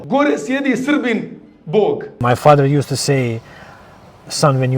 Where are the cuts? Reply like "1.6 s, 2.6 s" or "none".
2.2 s